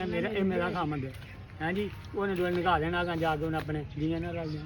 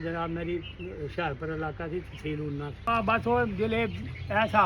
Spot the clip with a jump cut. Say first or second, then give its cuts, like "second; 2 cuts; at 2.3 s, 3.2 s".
second; 1 cut; at 2.8 s